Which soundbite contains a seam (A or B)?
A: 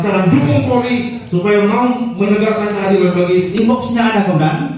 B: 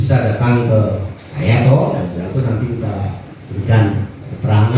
A